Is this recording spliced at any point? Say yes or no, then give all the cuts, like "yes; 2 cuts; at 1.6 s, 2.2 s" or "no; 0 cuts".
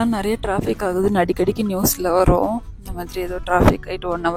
no; 0 cuts